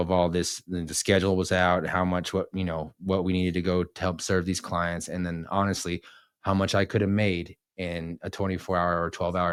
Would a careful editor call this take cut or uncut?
uncut